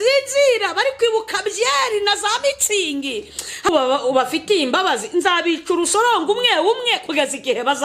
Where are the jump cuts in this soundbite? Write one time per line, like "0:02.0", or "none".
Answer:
0:03.7